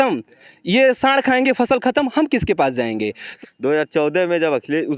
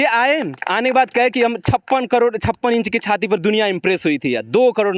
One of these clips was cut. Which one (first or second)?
first